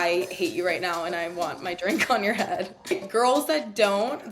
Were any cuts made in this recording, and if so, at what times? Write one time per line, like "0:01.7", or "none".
0:02.9

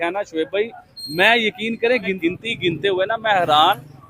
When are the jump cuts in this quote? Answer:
0:02.2

